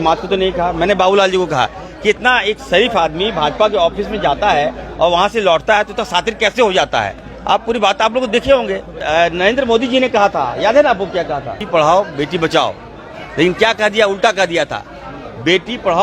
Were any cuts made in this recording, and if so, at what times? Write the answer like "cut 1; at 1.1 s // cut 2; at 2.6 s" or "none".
cut 1; at 8.9 s // cut 2; at 11.6 s